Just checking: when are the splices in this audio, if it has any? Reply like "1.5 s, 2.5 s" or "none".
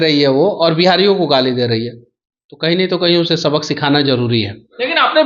none